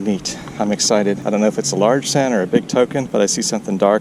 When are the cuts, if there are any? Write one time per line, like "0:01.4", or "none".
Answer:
0:01.2
0:03.1